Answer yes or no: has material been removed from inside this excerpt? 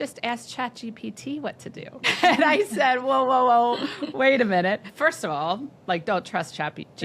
yes